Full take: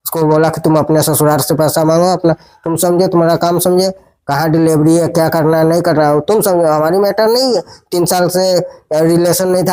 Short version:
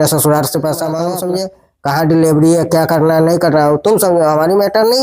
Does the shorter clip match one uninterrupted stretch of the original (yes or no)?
no